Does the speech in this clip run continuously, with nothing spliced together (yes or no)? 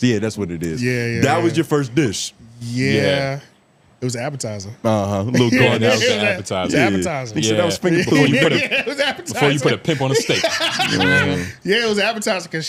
yes